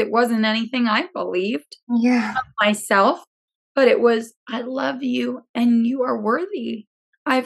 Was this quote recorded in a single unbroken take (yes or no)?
yes